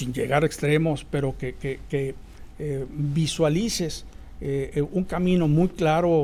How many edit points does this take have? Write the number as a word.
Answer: zero